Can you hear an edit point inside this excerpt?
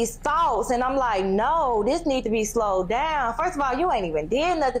no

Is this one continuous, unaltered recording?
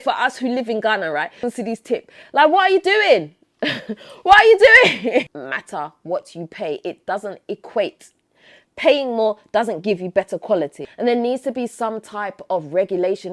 no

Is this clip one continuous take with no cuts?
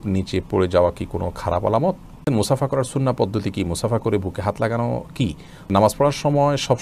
no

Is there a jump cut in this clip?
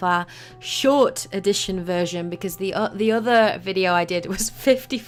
no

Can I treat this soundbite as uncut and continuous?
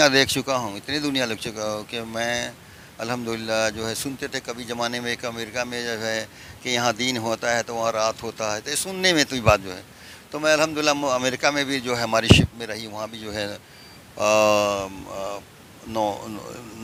yes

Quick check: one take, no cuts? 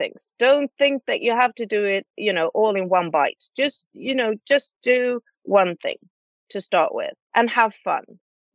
no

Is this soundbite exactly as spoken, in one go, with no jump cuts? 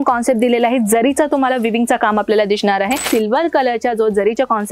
no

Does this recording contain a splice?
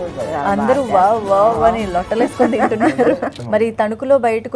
yes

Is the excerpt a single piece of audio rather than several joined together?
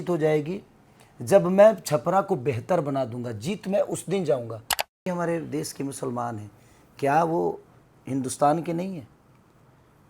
no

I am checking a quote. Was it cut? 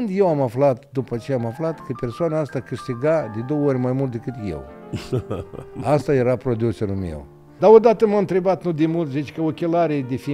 yes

